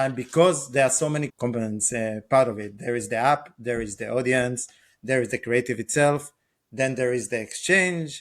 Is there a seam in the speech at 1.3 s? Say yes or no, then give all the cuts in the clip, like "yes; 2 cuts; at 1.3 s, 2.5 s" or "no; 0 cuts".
yes; 1 cut; at 1.3 s